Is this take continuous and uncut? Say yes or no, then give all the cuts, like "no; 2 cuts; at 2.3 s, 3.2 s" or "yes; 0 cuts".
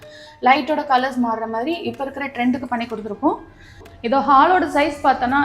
no; 1 cut; at 3.9 s